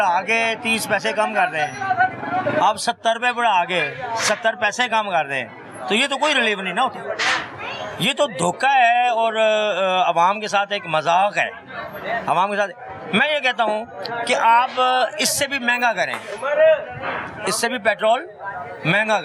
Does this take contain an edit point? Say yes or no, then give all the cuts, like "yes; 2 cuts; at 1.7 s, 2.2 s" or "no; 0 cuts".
no; 0 cuts